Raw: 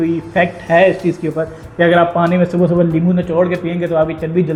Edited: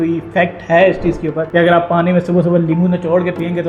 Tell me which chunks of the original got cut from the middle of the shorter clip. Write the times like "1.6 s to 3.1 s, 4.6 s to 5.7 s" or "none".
1.4 s to 1.7 s